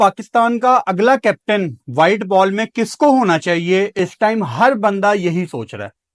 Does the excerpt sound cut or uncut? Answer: uncut